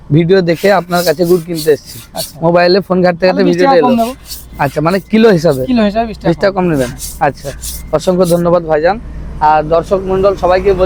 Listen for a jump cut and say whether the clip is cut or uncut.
uncut